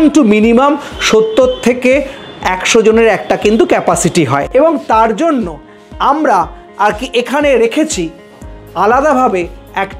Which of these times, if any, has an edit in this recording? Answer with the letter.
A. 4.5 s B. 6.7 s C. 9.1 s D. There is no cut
A